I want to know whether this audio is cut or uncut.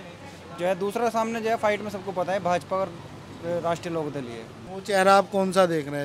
cut